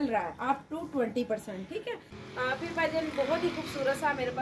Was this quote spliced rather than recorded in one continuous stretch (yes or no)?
yes